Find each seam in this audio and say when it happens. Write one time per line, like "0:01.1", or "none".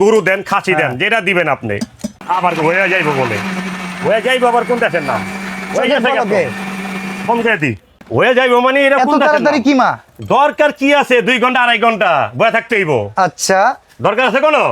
0:02.2
0:07.9